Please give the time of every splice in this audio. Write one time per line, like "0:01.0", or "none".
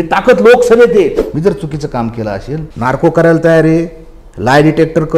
0:01.2
0:02.7